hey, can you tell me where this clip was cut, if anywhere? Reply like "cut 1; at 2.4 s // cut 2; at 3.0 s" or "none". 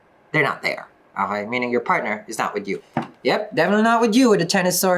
cut 1; at 2.9 s